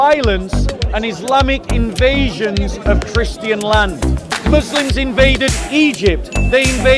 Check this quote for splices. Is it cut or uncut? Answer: cut